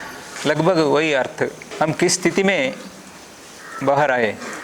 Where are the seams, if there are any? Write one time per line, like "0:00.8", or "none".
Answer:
0:01.6